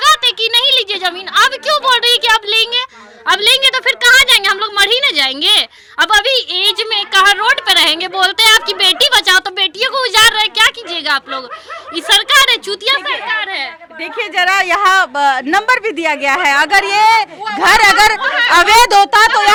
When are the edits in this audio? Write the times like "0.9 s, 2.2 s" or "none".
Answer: none